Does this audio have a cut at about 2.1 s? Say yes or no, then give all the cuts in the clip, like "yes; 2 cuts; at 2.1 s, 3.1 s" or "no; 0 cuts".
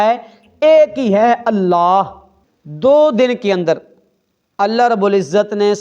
yes; 1 cut; at 2.1 s